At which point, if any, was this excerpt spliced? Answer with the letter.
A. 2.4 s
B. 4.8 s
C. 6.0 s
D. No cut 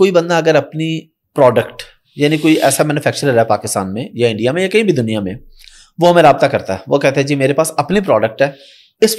D